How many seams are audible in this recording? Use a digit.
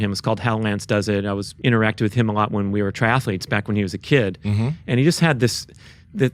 1